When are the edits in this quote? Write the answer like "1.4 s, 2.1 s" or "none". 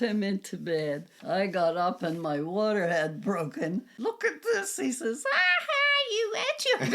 1.1 s, 3.9 s